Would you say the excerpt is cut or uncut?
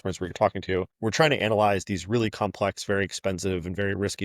cut